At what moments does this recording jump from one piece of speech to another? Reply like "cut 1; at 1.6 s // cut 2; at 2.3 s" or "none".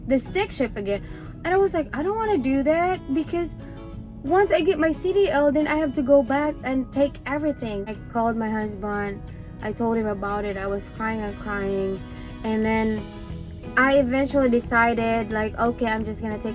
cut 1; at 8.0 s